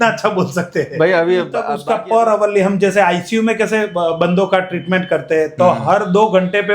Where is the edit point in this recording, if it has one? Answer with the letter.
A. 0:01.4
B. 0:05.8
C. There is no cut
A